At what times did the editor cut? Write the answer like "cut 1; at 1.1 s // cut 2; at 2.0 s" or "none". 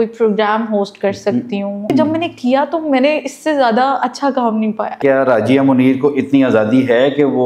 cut 1; at 1.9 s // cut 2; at 5.0 s